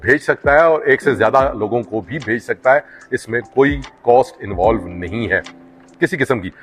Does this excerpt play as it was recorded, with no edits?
yes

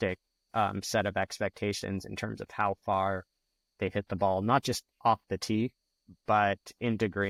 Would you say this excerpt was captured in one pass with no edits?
yes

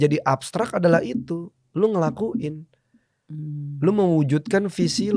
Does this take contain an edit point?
no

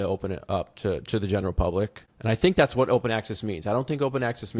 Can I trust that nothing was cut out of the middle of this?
no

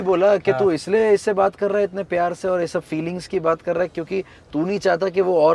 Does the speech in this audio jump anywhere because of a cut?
no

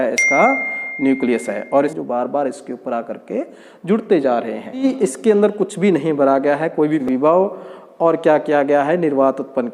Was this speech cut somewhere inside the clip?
yes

